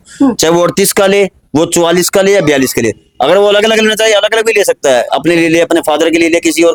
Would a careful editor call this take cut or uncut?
uncut